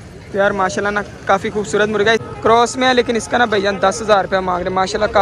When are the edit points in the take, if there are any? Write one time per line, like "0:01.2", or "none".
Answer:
0:02.2